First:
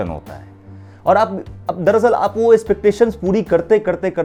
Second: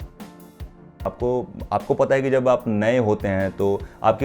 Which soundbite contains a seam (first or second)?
second